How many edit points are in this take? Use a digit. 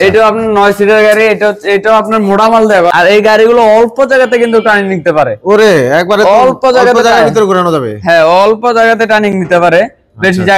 1